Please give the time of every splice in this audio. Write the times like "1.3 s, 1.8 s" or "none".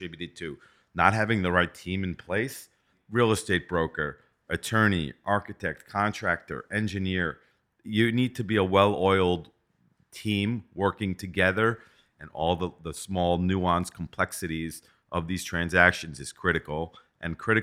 3.0 s, 11.9 s